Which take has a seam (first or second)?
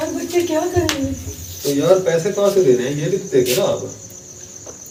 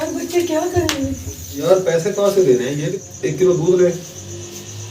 second